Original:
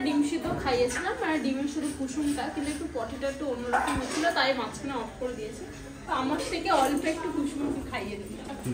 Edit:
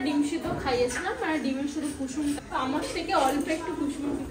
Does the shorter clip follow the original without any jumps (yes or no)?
no